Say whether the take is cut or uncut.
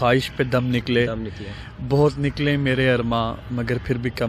uncut